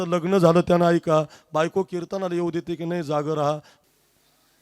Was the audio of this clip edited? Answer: yes; 1 cut; at 3.7 s

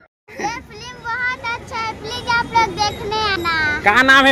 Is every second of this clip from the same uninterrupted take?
yes; 0 cuts

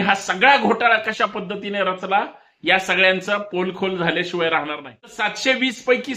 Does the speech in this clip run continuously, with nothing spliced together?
no; 1 cut; at 5.3 s

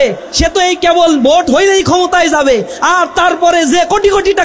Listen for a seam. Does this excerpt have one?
no; 0 cuts

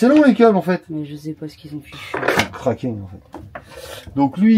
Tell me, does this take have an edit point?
no; 0 cuts

